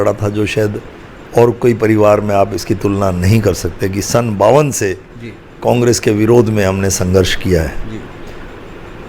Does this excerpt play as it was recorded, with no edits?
yes; 0 cuts

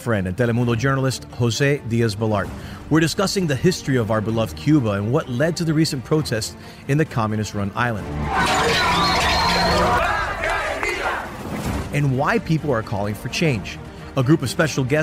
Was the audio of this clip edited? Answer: no; 0 cuts

